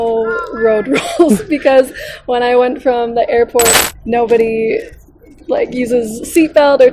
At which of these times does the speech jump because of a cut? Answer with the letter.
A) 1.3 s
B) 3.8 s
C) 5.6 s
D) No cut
B